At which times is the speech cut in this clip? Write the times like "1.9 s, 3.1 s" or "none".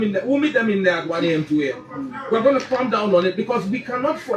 none